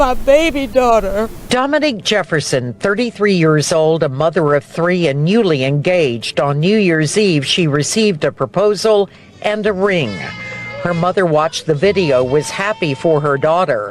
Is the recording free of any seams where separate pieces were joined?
no; 1 cut; at 1.5 s

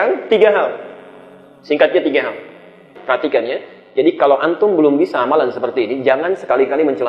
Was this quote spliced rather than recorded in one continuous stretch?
yes; 1 cut; at 2.9 s

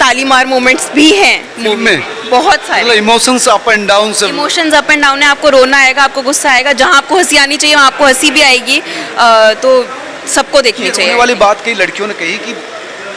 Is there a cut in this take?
no; 0 cuts

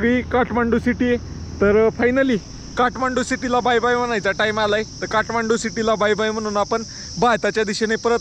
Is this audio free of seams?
yes; 0 cuts

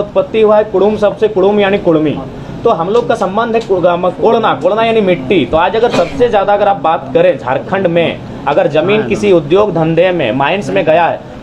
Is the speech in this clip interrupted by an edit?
no; 0 cuts

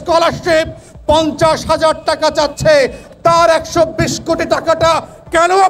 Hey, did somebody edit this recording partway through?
no; 0 cuts

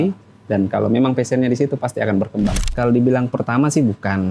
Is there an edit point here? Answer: yes; 1 cut; at 2.7 s

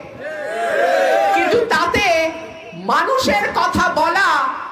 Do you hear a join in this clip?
no; 0 cuts

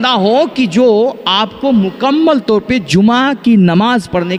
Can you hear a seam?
no; 0 cuts

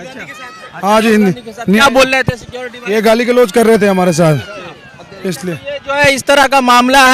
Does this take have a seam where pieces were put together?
no; 0 cuts

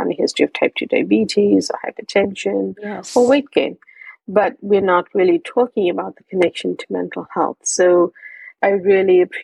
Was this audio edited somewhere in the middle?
yes; 1 cut; at 8.5 s

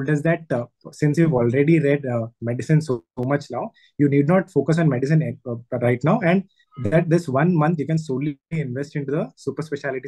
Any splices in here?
no; 0 cuts

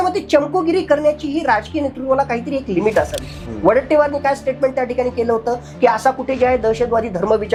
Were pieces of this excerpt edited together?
no; 0 cuts

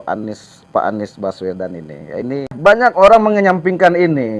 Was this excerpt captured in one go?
no; 1 cut; at 2.5 s

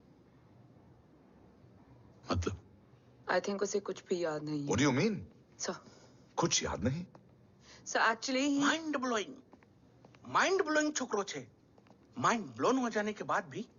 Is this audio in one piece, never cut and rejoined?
yes; 0 cuts

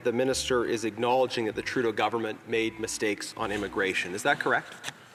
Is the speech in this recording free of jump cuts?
yes; 0 cuts

